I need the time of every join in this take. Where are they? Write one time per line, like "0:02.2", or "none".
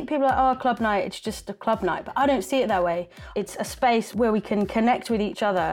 0:03.2
0:04.1